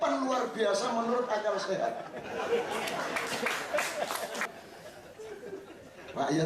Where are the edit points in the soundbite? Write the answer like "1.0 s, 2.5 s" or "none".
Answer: 4.4 s